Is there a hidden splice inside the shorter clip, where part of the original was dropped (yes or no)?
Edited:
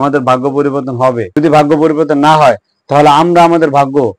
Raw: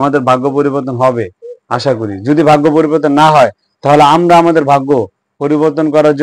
yes